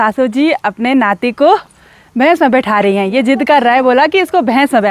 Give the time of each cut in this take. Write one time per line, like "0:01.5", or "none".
none

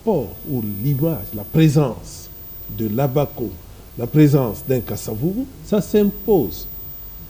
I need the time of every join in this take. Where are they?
none

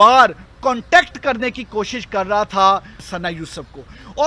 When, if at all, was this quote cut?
0:03.1

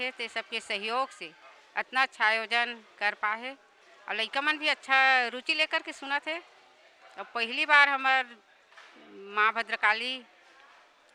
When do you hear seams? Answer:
none

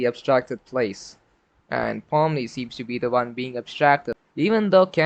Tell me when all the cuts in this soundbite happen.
0:04.1

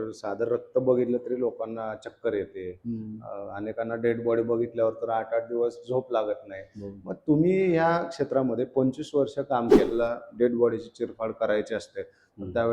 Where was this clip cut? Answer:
0:09.9

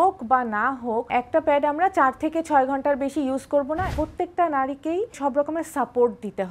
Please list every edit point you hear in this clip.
0:03.8
0:05.2

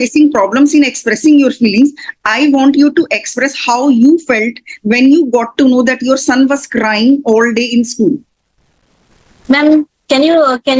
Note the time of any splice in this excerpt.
none

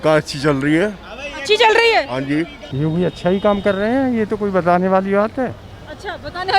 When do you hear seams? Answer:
0:02.6

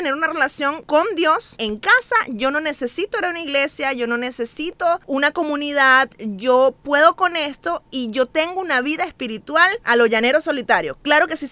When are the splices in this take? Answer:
0:00.8
0:01.5

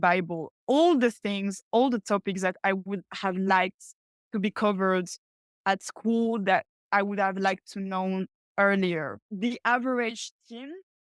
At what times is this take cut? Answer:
0:09.1

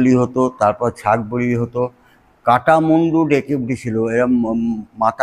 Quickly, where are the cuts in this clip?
none

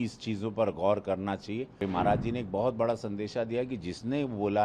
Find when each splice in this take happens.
0:01.8

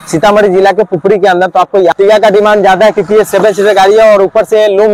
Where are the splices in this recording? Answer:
0:01.9

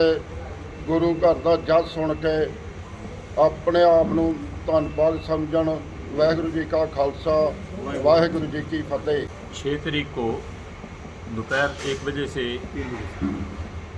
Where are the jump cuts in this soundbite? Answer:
0:09.4

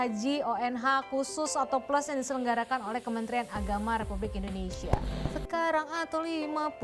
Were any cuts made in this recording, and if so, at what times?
0:05.1

